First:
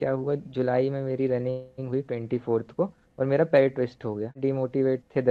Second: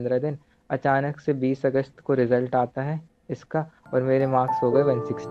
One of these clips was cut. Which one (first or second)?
first